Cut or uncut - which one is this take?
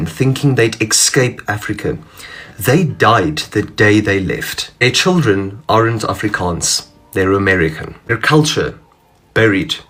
uncut